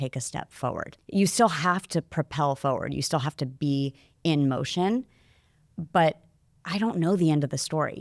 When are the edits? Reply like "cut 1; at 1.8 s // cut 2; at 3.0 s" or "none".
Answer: cut 1; at 0.9 s